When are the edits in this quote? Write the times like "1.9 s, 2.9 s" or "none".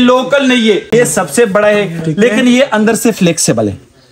0.9 s